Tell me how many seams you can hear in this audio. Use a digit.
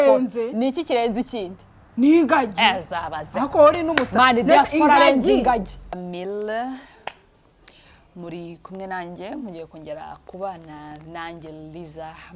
1